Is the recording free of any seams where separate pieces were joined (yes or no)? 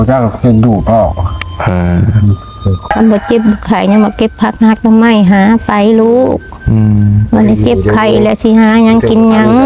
no